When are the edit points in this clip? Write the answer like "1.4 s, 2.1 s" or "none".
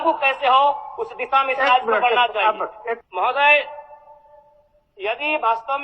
3.0 s